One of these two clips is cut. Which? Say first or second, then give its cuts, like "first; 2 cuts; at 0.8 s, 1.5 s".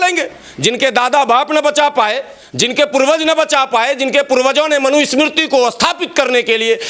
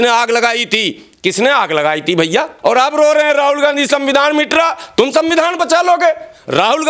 second; 1 cut; at 2.5 s